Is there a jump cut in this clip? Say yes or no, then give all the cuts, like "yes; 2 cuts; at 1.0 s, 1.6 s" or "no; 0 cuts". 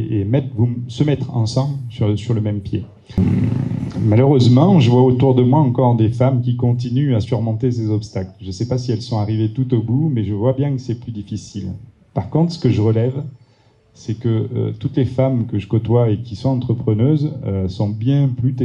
yes; 1 cut; at 3.2 s